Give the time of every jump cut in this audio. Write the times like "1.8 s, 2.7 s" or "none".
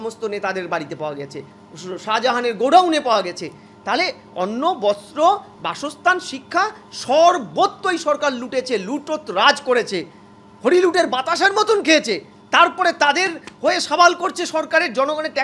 none